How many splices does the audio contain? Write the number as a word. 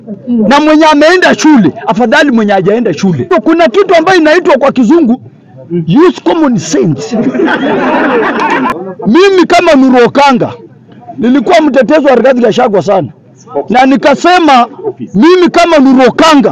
two